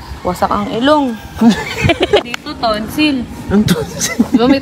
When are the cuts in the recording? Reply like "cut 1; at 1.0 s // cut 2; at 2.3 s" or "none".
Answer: none